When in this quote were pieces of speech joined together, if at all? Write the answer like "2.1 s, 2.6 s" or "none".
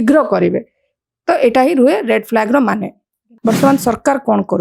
3.3 s